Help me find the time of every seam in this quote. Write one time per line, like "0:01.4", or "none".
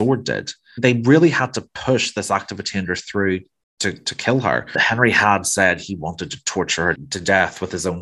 0:00.8
0:04.8
0:07.0